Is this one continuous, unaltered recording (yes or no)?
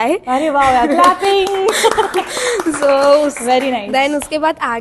yes